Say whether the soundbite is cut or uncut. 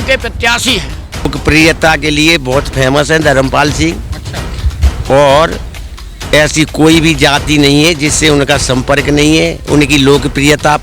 cut